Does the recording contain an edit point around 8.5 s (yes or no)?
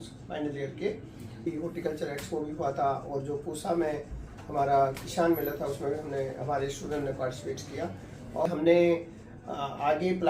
yes